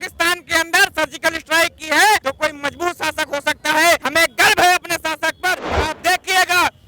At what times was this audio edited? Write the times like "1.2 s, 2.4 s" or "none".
2.2 s, 4.0 s, 5.6 s